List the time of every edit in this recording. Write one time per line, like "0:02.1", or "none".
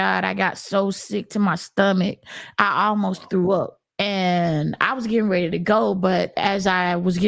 0:03.8